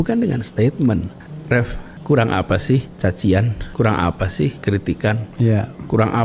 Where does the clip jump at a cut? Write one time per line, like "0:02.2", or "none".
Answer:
0:01.4
0:02.9
0:03.6
0:04.6